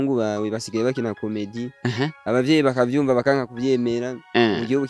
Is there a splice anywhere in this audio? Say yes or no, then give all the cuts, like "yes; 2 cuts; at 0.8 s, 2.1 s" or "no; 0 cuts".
no; 0 cuts